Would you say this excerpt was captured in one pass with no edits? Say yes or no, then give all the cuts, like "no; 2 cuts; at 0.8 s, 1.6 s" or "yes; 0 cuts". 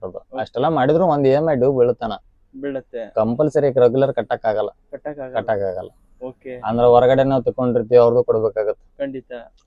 yes; 0 cuts